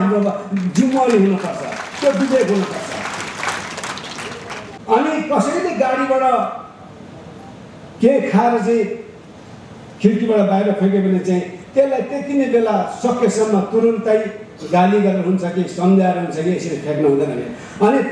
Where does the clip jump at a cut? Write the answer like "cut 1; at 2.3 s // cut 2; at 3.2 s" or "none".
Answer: cut 1; at 4.8 s